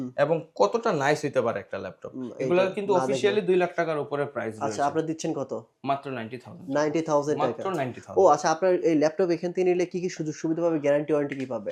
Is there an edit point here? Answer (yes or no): no